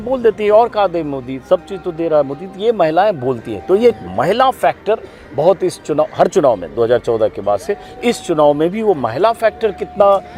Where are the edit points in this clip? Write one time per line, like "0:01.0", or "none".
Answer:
none

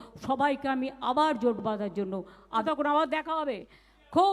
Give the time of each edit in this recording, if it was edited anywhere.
0:02.6

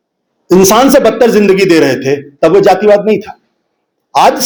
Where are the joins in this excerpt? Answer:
none

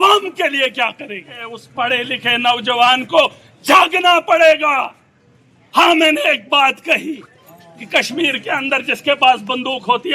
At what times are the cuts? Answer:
0:01.6

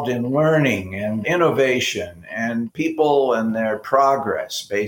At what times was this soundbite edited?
0:02.7

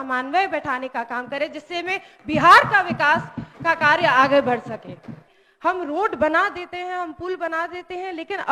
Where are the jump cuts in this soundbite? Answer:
0:05.4

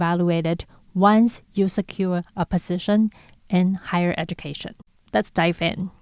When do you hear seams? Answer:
0:05.0

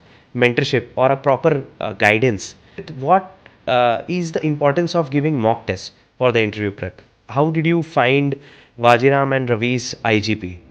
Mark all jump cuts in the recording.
0:02.9
0:07.1

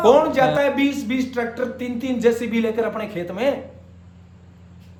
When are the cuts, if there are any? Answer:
none

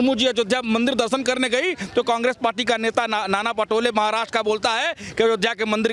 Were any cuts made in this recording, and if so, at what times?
none

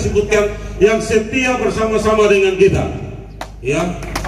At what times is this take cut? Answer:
none

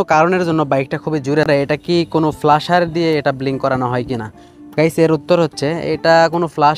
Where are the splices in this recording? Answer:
0:01.5

